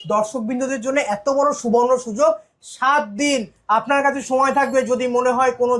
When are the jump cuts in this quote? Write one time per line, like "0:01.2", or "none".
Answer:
none